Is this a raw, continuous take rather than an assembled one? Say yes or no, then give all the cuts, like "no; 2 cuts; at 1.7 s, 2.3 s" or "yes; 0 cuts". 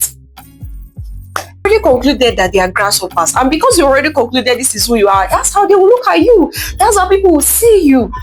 no; 1 cut; at 1.6 s